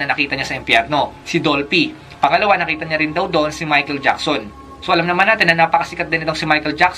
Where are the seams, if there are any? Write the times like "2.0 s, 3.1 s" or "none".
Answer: none